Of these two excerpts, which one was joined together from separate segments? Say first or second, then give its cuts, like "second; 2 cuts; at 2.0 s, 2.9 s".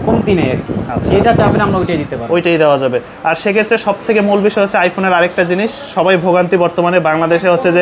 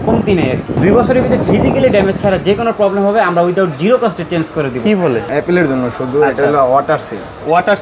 second; 2 cuts; at 0.8 s, 5.3 s